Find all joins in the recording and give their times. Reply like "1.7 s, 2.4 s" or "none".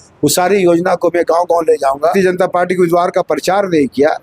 2.1 s